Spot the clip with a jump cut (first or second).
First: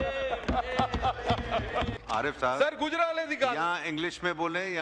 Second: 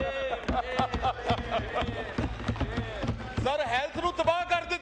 first